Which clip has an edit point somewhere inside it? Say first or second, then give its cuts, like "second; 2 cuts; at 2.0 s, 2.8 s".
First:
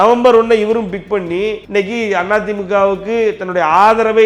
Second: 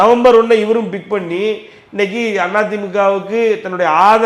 first; 1 cut; at 1.6 s